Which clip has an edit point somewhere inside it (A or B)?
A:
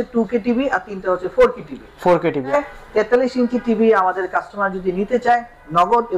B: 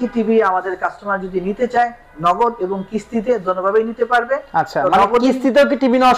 A